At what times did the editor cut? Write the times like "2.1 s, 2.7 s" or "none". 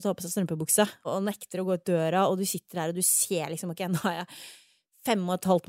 1.0 s